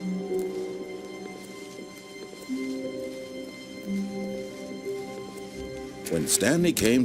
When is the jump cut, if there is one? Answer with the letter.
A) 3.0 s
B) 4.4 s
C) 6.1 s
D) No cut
C